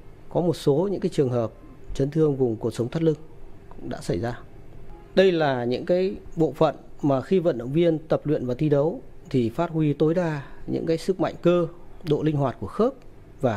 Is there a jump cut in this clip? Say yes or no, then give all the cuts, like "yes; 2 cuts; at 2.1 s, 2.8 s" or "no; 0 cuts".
no; 0 cuts